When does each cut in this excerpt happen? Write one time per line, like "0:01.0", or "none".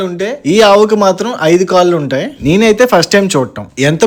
none